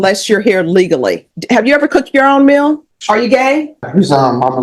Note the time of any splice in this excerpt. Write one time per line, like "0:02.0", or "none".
0:01.3
0:02.9
0:03.9